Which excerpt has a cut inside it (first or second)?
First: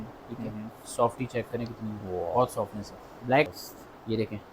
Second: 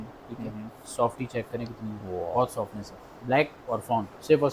first